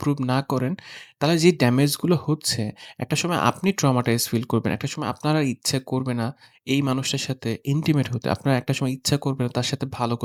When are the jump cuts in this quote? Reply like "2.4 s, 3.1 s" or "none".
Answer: none